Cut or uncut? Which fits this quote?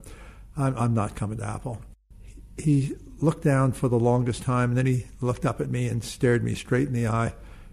cut